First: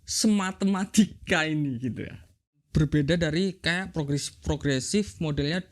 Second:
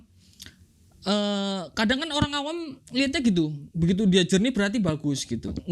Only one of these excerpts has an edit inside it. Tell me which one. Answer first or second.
first